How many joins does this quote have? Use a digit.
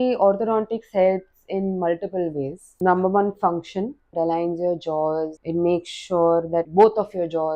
4